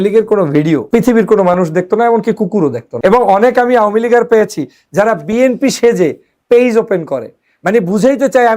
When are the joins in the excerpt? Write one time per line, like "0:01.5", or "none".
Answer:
0:00.8
0:02.9